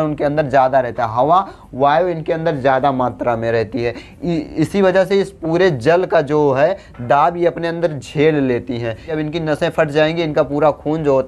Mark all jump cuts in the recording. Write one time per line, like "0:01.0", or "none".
0:09.1

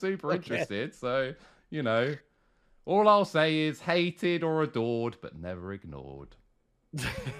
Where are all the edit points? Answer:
none

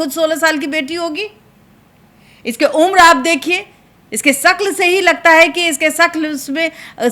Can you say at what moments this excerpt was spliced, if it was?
none

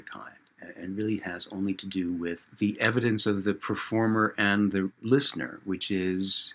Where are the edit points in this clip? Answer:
0:02.5
0:05.0

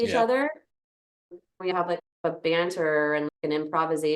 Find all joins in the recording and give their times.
0:01.7

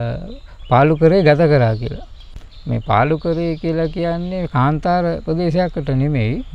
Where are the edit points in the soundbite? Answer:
none

